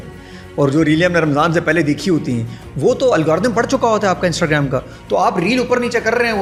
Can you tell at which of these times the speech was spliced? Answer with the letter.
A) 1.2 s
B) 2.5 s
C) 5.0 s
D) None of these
D